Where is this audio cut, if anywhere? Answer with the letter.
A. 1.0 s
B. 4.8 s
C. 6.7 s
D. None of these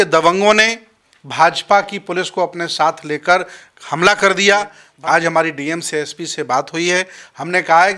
B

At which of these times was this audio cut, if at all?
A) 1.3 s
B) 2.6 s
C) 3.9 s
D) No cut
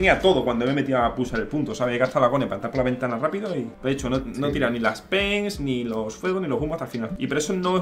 D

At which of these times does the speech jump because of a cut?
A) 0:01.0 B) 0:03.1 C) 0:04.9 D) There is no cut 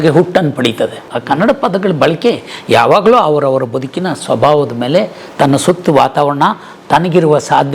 A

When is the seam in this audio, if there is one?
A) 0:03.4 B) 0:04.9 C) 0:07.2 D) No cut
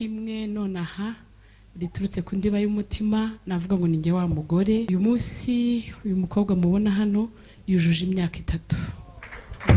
B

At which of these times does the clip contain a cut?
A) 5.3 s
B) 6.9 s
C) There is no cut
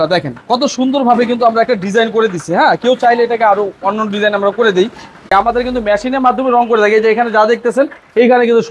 A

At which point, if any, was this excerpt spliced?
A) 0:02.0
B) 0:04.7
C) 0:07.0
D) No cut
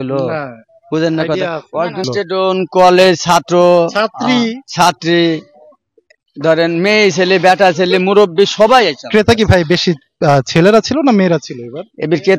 A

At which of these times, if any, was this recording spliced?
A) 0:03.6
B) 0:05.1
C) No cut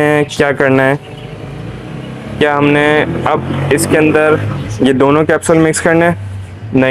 C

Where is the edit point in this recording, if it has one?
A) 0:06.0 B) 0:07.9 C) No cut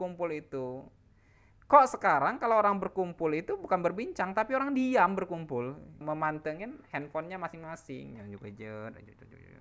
A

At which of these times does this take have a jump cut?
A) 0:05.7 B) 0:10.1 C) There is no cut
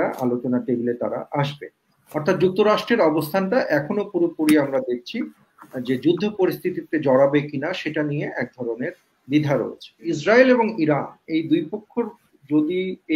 B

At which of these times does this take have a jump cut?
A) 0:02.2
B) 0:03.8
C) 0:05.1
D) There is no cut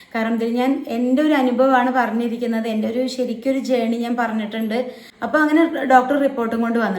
C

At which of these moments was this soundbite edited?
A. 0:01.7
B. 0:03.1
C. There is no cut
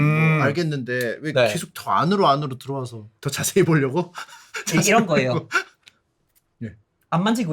B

